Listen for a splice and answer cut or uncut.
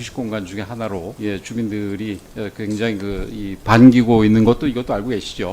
cut